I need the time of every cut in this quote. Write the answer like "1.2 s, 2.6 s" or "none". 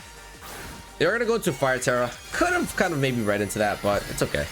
none